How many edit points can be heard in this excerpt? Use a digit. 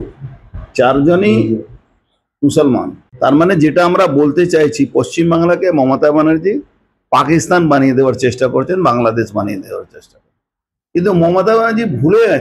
1